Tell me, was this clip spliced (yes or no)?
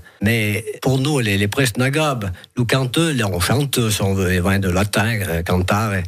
no